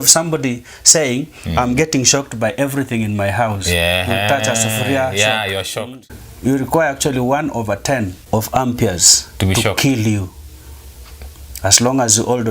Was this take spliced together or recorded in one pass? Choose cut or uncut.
cut